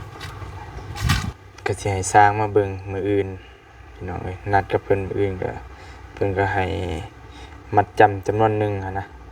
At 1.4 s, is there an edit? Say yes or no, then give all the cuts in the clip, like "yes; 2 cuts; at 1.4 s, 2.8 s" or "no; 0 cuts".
yes; 1 cut; at 1.4 s